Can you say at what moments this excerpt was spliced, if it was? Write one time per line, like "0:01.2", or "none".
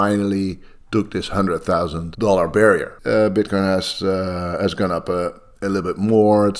0:02.0
0:02.9

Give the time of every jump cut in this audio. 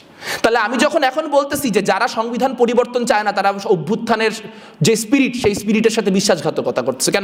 none

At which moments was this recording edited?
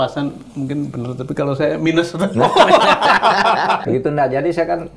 0:03.8

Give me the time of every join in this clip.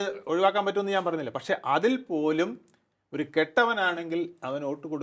none

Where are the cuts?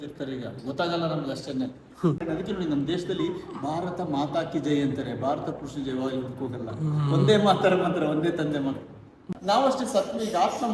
0:02.2
0:09.2

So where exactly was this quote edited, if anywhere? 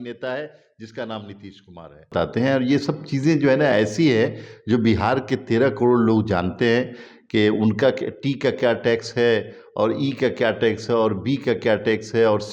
0:02.1

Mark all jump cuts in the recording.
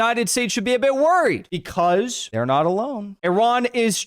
0:03.0

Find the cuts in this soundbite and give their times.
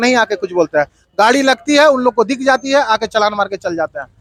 none

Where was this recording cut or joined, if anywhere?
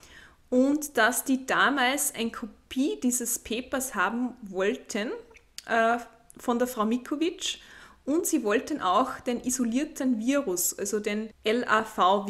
0:11.3

